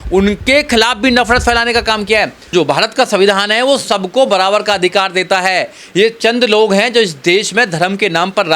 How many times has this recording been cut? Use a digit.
1